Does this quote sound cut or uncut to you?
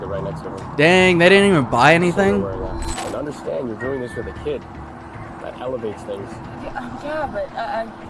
cut